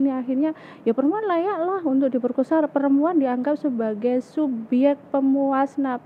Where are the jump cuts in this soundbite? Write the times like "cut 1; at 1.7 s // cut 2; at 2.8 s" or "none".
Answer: none

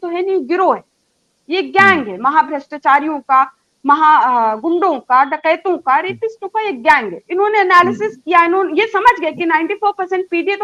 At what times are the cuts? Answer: none

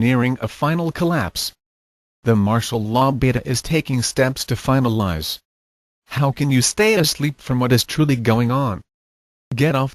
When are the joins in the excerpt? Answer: none

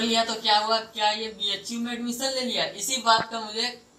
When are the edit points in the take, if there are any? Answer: none

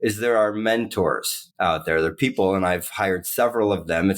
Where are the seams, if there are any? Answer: none

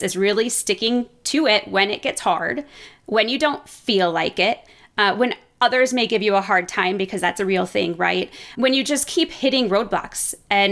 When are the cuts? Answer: none

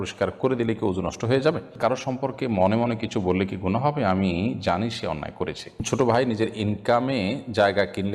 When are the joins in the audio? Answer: cut 1; at 1.8 s // cut 2; at 5.8 s

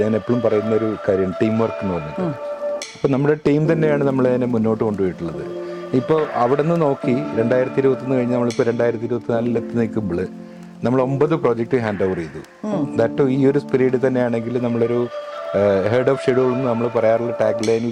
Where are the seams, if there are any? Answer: none

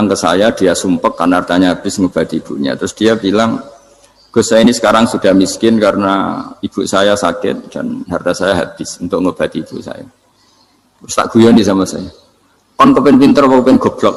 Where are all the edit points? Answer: none

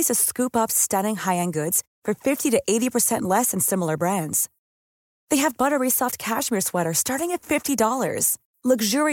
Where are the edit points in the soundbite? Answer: none

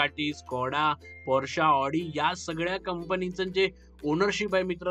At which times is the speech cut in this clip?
none

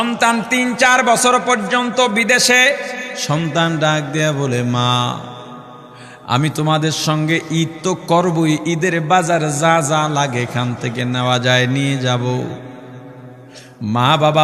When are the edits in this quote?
cut 1; at 3.1 s

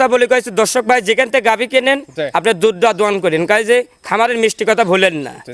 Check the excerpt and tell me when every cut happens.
none

